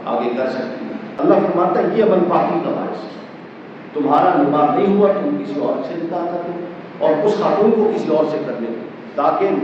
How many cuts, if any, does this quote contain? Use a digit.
1